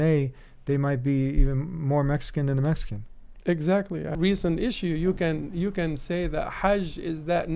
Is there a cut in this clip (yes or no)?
yes